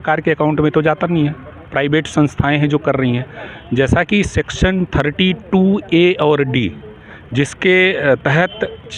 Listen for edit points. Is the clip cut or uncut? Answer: uncut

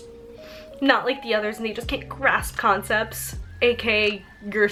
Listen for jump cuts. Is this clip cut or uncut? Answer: uncut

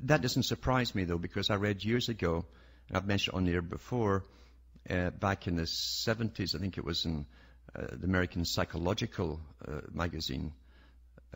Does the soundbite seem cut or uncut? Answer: uncut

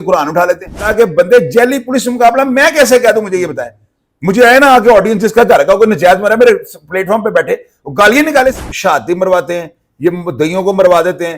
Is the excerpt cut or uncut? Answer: cut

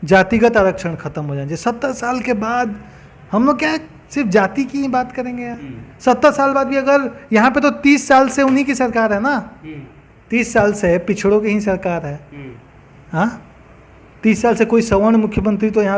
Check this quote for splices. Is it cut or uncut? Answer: uncut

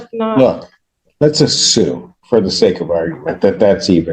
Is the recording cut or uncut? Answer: uncut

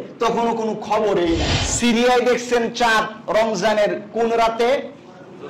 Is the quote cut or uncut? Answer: cut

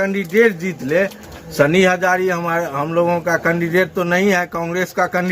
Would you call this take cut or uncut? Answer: cut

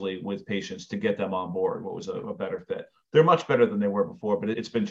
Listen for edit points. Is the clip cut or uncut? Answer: uncut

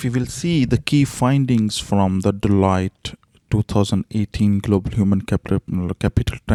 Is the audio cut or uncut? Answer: uncut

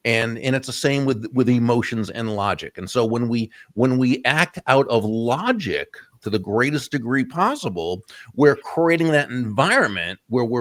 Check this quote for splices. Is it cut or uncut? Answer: uncut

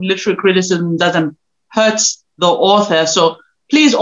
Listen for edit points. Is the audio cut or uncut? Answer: uncut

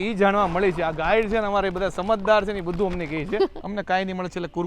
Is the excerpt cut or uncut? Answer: cut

